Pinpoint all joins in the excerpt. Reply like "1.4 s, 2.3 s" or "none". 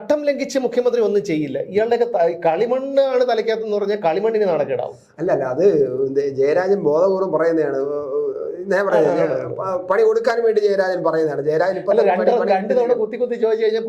none